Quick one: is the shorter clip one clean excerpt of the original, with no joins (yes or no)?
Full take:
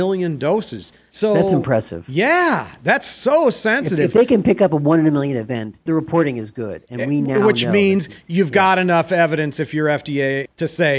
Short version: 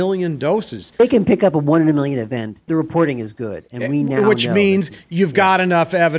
no